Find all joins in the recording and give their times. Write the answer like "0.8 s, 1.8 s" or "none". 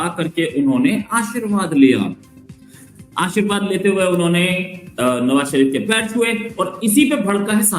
none